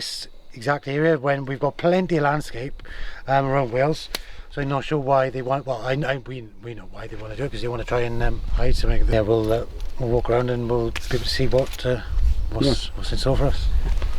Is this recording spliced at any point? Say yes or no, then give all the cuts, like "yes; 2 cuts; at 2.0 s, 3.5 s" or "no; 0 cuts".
yes; 1 cut; at 9.1 s